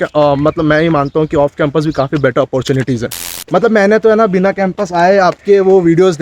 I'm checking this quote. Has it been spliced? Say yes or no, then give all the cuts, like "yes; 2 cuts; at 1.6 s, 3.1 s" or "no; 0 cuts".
yes; 1 cut; at 3.3 s